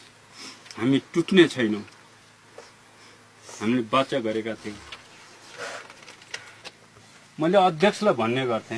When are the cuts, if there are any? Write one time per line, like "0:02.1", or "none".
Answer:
0:06.5